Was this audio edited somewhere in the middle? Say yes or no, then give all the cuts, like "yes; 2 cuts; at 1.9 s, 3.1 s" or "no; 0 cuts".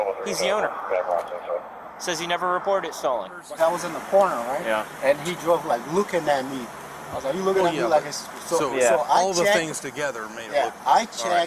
yes; 1 cut; at 3.4 s